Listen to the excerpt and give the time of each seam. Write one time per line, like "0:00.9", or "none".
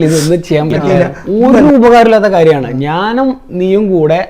0:01.2